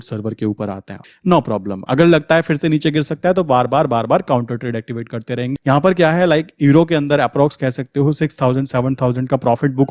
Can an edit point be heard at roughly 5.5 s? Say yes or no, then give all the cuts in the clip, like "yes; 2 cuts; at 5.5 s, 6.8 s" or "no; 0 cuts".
yes; 2 cuts; at 1.0 s, 5.5 s